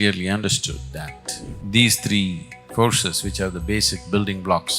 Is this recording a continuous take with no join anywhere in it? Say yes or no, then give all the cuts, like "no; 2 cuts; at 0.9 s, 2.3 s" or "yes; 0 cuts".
no; 1 cut; at 1.6 s